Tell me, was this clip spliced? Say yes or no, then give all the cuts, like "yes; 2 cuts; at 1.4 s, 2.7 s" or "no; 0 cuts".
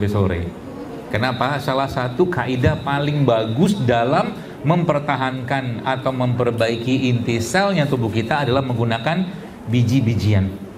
no; 0 cuts